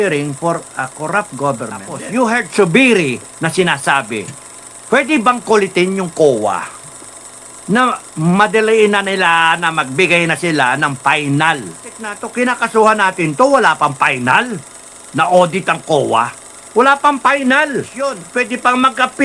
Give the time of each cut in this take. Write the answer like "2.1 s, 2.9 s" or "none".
2.0 s, 12.2 s, 18.2 s